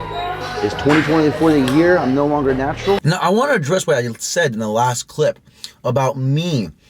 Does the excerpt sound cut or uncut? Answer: cut